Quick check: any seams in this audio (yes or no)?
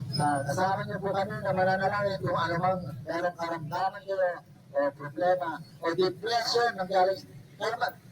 yes